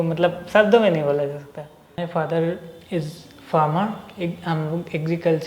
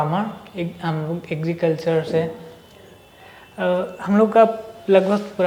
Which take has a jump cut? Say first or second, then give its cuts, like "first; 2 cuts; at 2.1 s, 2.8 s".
first; 1 cut; at 2.0 s